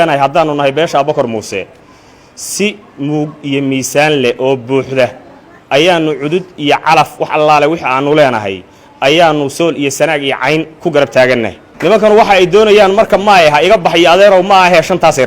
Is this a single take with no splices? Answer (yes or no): no